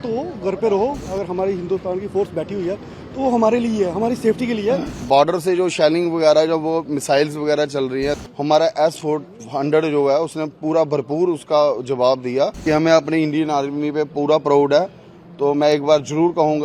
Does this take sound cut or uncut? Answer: cut